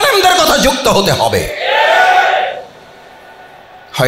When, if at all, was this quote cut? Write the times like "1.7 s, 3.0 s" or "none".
none